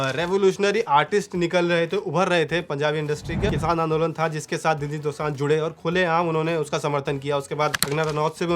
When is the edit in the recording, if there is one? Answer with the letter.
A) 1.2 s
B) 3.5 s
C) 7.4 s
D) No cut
B